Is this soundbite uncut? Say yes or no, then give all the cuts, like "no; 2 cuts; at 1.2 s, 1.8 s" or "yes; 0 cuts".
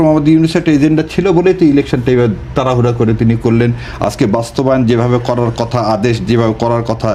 yes; 0 cuts